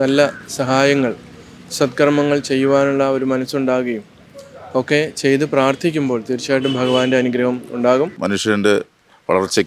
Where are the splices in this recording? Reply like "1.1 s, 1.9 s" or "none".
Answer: 8.2 s